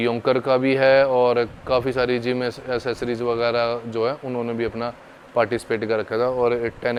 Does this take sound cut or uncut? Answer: uncut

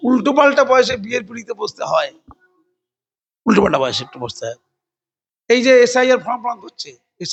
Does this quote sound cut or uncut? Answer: uncut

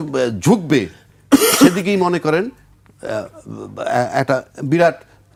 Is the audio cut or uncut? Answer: uncut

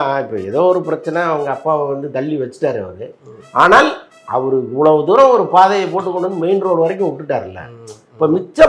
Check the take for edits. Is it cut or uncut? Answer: uncut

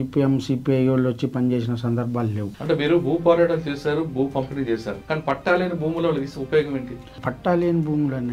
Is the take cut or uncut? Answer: cut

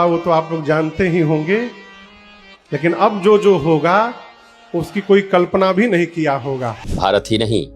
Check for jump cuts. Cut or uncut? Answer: cut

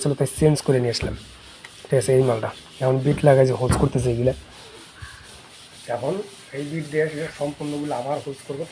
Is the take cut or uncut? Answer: uncut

